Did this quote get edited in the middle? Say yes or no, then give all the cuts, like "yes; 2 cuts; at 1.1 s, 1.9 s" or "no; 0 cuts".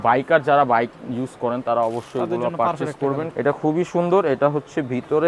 yes; 1 cut; at 3.3 s